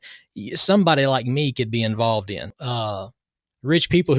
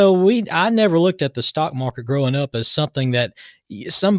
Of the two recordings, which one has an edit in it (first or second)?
first